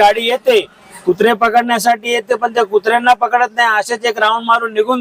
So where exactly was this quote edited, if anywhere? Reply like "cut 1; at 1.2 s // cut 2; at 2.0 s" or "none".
none